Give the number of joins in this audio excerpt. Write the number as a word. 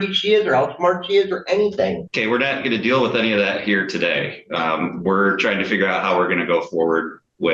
zero